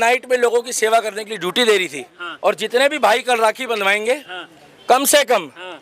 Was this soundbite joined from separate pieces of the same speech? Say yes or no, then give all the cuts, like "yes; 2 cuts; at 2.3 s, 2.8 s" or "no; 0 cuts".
yes; 1 cut; at 2.2 s